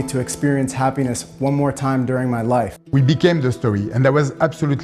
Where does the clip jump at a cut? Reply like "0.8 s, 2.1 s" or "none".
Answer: 2.8 s

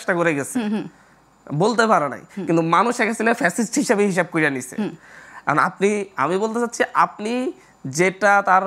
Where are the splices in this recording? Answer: none

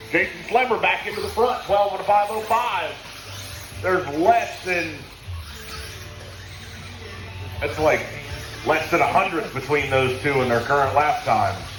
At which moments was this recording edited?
none

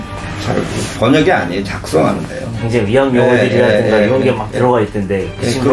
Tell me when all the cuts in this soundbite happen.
0.9 s, 2.6 s

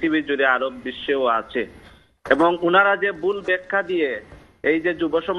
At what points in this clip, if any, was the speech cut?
none

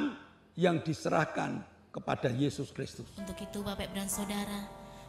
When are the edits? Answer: 3.0 s

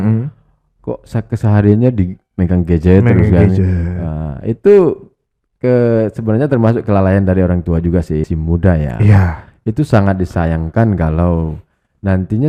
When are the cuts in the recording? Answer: 8.2 s

